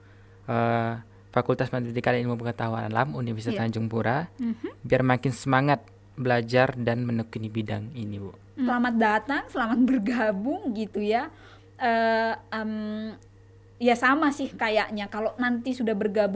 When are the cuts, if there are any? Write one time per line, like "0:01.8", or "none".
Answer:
0:08.7

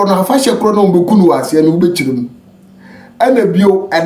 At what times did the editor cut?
none

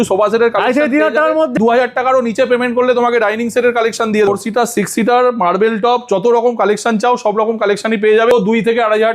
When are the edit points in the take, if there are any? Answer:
0:01.6
0:04.3
0:08.3

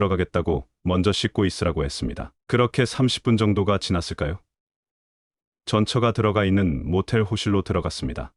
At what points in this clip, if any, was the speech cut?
none

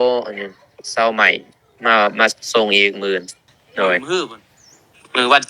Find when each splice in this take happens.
0:04.0

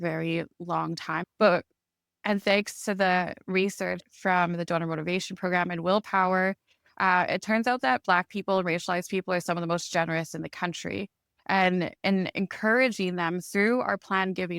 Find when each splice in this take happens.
0:01.3
0:04.0

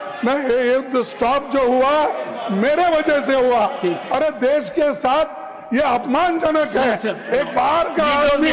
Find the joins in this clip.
none

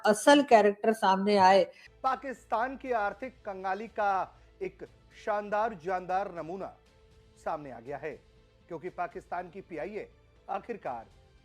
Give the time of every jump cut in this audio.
0:01.8

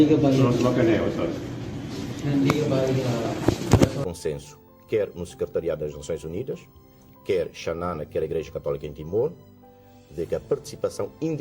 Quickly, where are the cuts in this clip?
0:04.0

